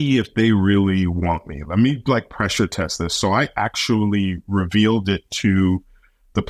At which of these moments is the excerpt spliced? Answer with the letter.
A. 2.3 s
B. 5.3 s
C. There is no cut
C